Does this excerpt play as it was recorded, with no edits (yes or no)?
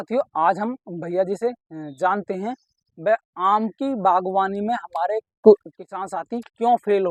yes